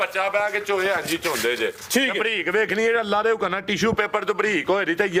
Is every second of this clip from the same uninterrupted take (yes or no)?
yes